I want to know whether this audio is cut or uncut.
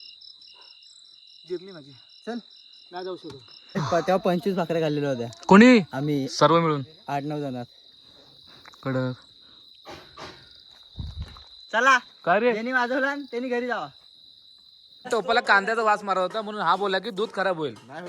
cut